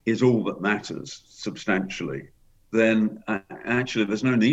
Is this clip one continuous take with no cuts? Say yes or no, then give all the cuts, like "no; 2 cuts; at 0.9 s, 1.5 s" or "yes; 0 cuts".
yes; 0 cuts